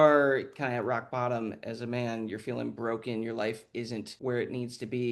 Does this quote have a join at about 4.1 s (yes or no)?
yes